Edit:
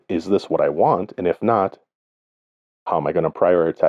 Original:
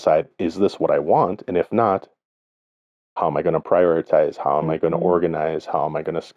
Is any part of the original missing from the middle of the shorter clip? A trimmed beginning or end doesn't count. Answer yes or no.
no